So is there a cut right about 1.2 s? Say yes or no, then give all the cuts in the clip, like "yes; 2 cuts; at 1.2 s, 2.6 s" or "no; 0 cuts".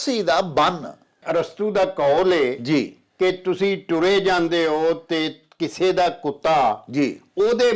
yes; 1 cut; at 1.2 s